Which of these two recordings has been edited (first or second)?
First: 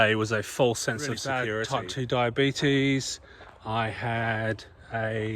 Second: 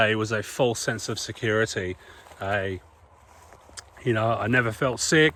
first